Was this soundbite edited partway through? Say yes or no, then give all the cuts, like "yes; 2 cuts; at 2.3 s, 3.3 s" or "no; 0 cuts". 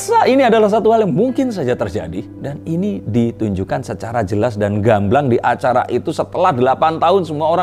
no; 0 cuts